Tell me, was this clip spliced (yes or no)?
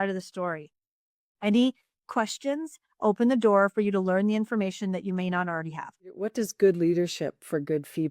yes